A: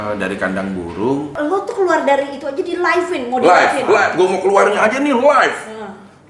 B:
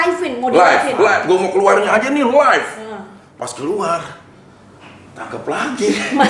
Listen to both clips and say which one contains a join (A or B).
A